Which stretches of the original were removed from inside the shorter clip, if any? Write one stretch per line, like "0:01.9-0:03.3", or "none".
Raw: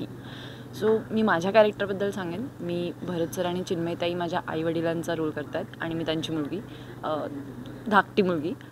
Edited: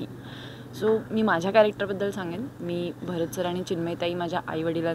none